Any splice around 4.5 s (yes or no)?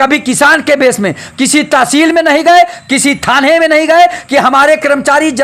no